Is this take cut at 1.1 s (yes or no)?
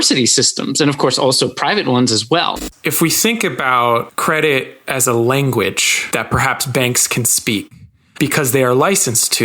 no